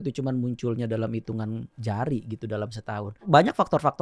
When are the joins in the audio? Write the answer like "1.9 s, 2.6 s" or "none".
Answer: 1.7 s, 3.2 s